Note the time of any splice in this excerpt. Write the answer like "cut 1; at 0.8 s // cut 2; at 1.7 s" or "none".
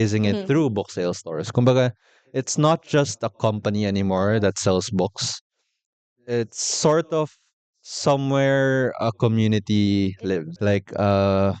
cut 1; at 10.5 s